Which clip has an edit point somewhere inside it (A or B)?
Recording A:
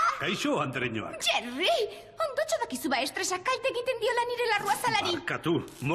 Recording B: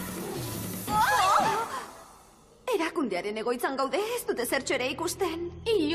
B